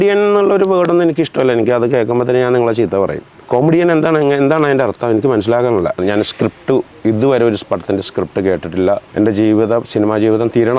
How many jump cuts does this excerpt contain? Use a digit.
3